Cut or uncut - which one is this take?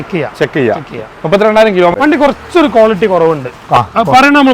cut